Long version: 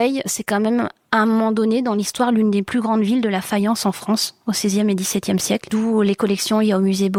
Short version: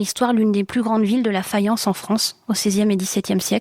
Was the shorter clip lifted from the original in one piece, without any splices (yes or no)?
yes